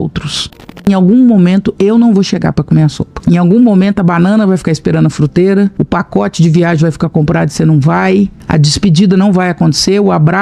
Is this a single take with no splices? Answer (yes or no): no